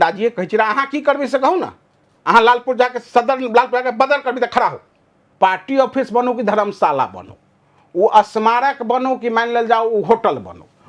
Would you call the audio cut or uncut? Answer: cut